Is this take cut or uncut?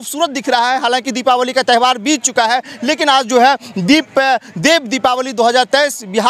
uncut